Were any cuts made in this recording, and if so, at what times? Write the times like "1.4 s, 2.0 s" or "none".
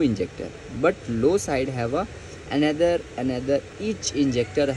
none